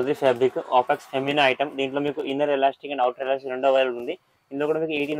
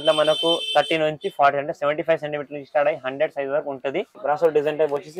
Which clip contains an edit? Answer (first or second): second